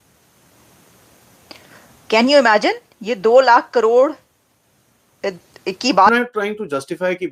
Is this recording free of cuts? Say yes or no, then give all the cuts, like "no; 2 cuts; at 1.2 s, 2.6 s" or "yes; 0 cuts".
no; 1 cut; at 6.1 s